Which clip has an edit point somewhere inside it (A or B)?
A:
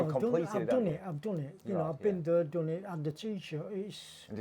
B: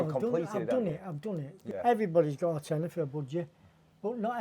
B